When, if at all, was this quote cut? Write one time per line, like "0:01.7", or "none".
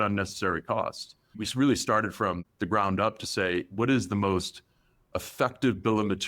0:02.5